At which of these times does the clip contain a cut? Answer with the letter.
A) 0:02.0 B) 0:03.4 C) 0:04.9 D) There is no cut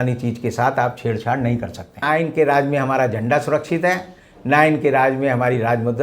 A